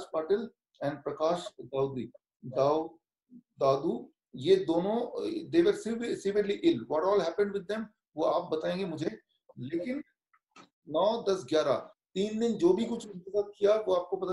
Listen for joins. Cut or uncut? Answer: uncut